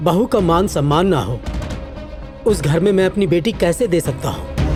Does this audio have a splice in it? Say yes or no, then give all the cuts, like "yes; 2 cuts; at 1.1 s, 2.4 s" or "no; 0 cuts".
no; 0 cuts